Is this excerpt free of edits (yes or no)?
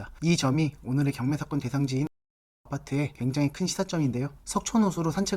no